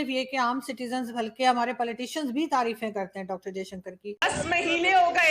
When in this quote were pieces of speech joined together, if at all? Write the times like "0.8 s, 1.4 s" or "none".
4.1 s